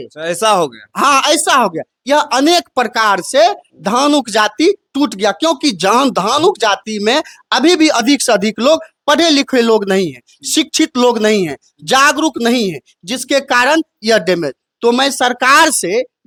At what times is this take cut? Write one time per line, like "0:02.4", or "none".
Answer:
none